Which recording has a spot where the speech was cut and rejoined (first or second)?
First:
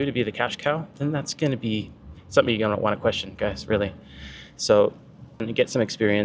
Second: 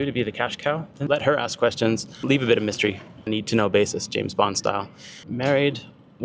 second